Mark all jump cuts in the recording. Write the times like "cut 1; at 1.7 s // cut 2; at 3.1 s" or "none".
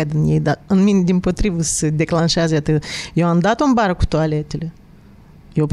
none